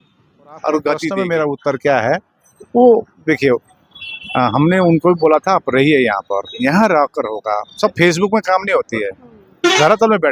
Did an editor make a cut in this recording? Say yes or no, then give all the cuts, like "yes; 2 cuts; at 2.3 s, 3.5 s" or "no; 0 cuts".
yes; 1 cut; at 1.2 s